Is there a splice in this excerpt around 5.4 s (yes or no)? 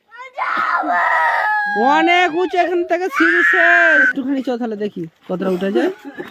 no